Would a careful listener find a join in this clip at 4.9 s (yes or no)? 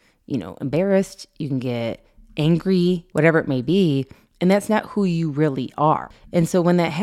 no